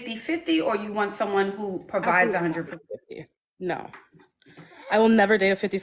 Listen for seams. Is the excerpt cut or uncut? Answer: uncut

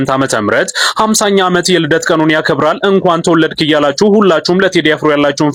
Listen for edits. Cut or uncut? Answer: uncut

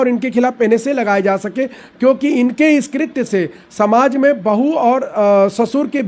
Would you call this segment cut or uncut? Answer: uncut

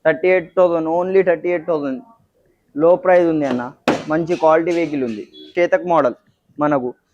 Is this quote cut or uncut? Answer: cut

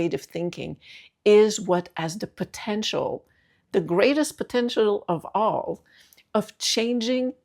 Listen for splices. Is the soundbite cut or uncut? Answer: uncut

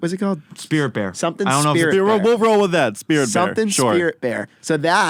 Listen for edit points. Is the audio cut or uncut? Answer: uncut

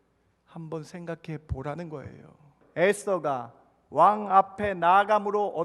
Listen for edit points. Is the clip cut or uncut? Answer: cut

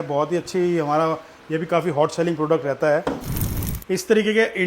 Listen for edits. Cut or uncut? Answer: cut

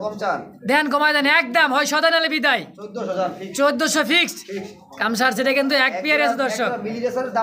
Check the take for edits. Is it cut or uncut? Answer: uncut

